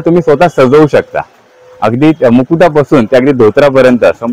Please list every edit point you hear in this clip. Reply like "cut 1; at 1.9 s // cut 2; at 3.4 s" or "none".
none